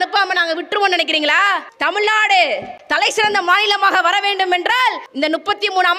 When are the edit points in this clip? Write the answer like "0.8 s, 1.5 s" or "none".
1.7 s, 2.8 s, 5.1 s

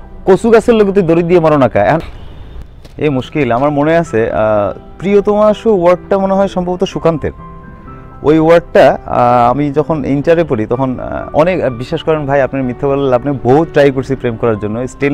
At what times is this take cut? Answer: 2.0 s

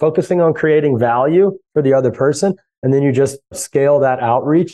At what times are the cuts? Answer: 3.6 s

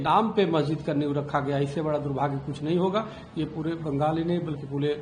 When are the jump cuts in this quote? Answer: none

